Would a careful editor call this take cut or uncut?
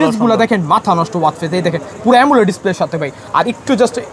uncut